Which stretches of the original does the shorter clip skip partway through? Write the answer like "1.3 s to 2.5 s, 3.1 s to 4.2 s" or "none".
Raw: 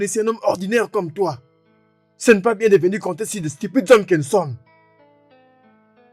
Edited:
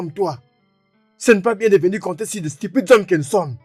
none

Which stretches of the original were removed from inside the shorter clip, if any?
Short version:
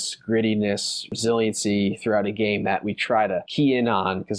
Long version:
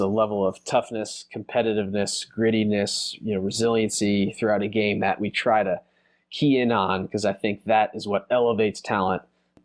3.2 s to 3.5 s, 5.8 s to 6.3 s

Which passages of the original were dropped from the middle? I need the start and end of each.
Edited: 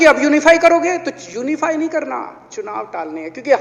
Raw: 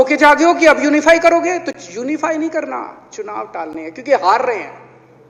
none

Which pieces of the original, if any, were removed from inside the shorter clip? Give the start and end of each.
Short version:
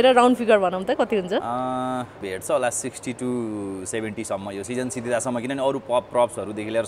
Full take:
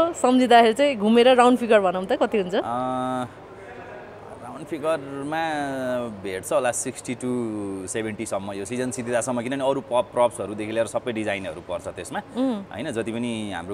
3.4 s to 6.2 s

